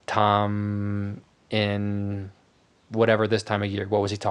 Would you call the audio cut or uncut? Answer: uncut